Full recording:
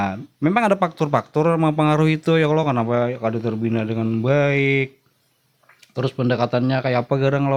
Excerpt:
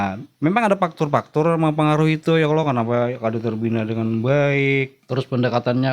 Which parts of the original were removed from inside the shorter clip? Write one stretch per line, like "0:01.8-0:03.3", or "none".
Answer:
0:05.0-0:05.9